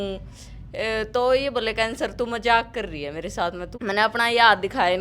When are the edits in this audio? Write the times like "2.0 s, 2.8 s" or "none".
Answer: 3.7 s

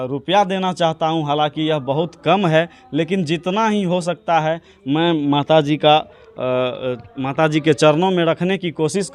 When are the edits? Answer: none

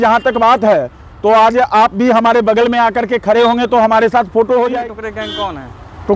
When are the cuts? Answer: 4.7 s

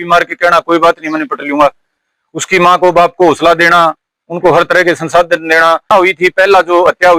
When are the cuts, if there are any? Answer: 5.8 s

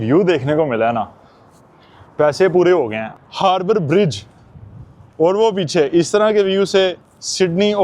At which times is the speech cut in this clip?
3.0 s

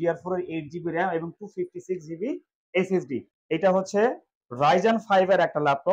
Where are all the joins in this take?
3.2 s

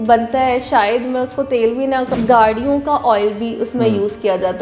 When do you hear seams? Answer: 2.1 s

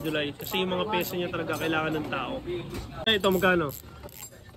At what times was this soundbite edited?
3.1 s

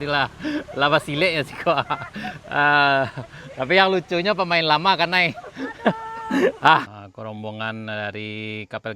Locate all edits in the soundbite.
6.9 s

